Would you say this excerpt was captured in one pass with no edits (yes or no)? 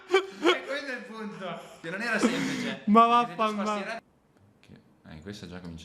no